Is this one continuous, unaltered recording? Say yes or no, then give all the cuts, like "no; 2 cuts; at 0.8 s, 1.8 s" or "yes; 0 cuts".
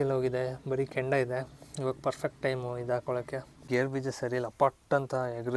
no; 1 cut; at 3.5 s